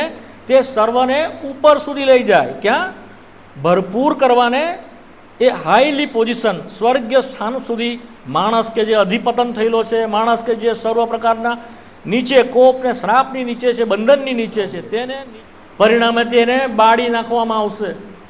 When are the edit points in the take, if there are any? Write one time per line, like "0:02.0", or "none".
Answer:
0:15.1